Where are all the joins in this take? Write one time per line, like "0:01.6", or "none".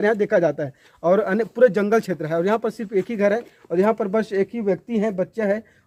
none